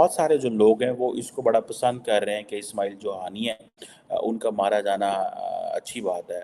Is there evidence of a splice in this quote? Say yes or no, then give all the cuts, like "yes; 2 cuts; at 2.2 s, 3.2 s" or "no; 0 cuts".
no; 0 cuts